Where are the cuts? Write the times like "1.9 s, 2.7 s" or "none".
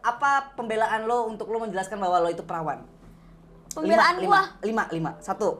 none